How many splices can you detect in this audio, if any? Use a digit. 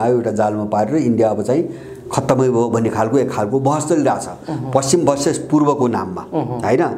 0